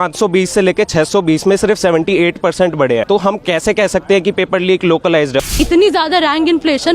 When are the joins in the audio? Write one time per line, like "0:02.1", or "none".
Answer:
0:03.0
0:05.5

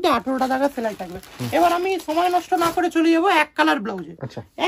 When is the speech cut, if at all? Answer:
none

